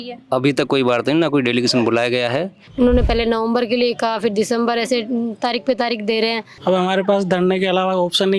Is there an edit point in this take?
yes; 2 cuts; at 2.6 s, 6.5 s

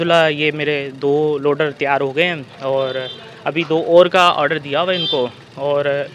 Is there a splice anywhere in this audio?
no; 0 cuts

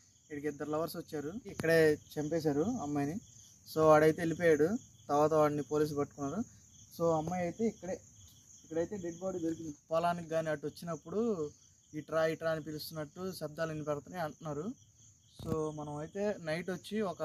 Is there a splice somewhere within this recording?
yes; 2 cuts; at 1.5 s, 9.7 s

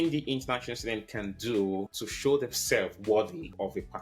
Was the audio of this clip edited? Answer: yes; 1 cut; at 2.0 s

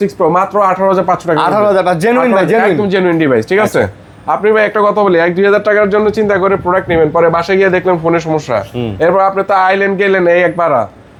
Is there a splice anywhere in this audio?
no; 0 cuts

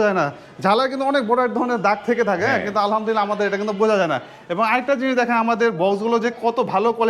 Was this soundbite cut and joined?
no; 0 cuts

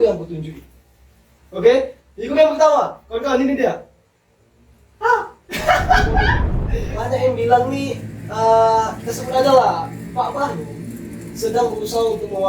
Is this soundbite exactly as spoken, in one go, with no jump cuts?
no; 1 cut; at 6.5 s

